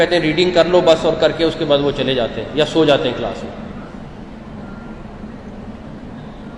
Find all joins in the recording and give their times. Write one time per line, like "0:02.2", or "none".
none